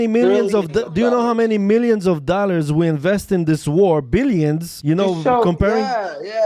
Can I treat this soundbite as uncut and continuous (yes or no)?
no